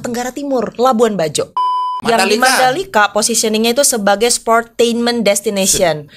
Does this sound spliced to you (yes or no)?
yes